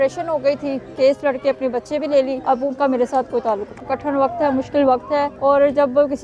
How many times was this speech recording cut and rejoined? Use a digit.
4